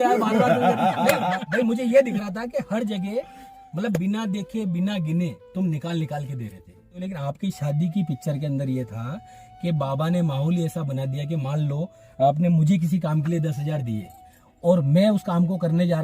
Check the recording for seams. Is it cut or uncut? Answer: cut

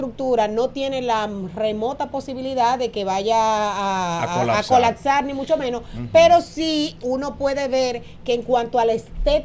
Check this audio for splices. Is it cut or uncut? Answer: uncut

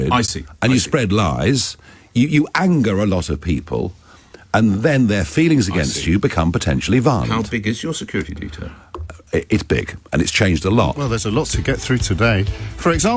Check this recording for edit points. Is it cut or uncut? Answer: cut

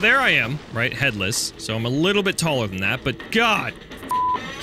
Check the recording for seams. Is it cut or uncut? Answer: uncut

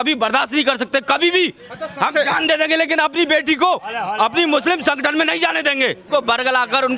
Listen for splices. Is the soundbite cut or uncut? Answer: cut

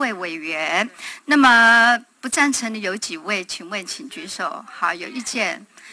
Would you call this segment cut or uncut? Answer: uncut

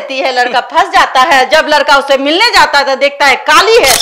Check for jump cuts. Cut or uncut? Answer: uncut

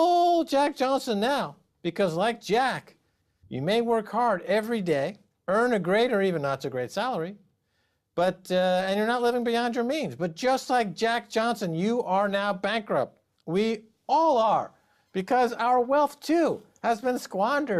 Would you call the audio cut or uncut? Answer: cut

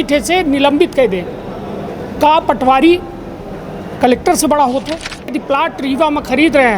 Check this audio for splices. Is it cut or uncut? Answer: cut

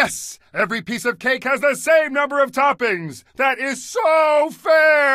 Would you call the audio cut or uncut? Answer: uncut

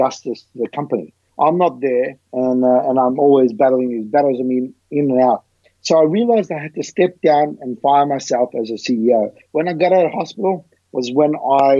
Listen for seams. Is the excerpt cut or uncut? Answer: cut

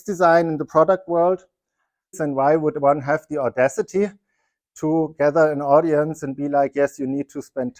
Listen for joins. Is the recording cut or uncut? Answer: cut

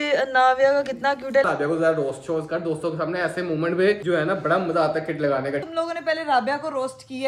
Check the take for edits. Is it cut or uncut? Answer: cut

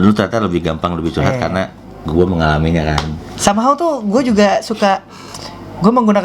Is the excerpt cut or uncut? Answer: uncut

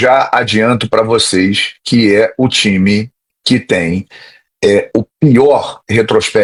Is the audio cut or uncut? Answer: uncut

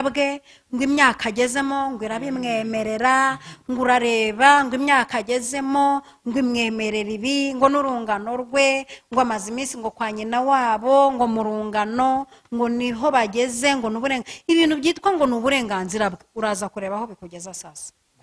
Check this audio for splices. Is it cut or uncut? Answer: uncut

